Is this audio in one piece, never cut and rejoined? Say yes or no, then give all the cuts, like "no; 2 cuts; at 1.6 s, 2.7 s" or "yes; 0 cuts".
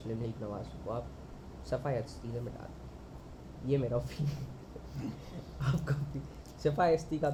yes; 0 cuts